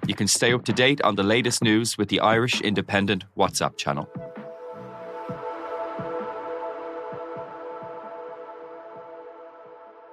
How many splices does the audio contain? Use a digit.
0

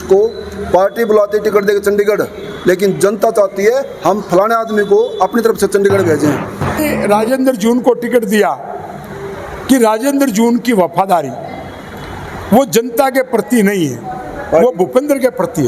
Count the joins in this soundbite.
1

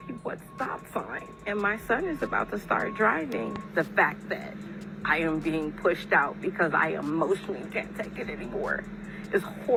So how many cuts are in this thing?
0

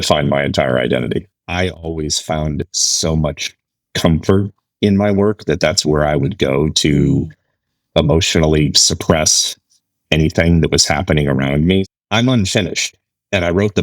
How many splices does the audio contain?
2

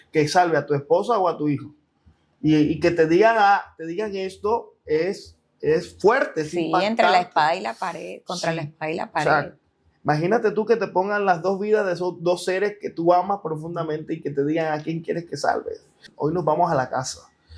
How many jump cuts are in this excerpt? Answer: 1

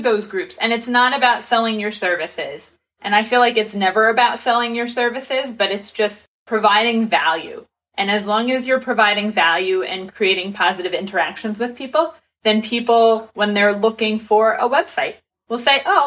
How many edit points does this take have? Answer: 1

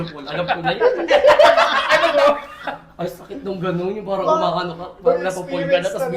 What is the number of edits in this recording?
0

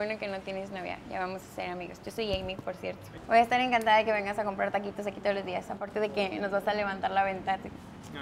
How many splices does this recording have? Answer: 1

